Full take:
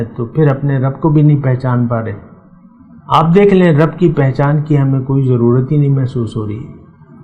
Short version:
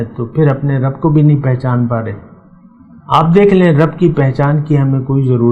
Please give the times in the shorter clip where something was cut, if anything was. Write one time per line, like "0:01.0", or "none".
none